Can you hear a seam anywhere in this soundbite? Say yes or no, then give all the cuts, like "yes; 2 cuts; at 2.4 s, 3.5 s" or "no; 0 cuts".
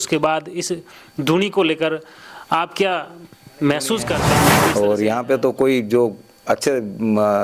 yes; 1 cut; at 4.6 s